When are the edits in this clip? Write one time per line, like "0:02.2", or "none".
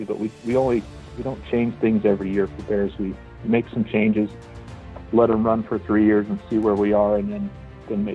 none